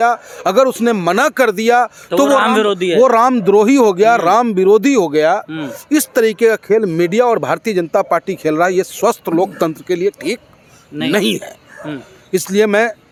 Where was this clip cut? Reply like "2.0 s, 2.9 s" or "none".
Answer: none